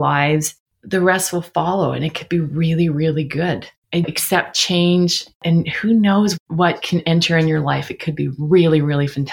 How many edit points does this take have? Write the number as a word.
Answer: one